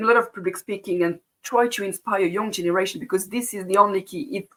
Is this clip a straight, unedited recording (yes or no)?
yes